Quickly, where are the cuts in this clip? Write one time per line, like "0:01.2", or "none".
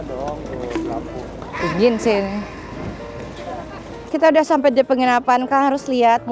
0:04.0